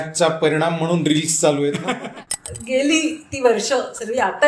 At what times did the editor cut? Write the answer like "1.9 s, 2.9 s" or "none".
2.0 s